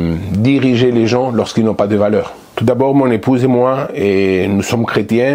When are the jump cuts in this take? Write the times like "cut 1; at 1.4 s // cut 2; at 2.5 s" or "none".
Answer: cut 1; at 2.4 s